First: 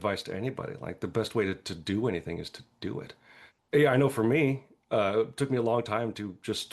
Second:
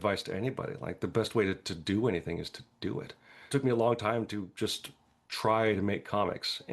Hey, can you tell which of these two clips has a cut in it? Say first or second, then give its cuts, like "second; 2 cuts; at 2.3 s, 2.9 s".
second; 1 cut; at 3.5 s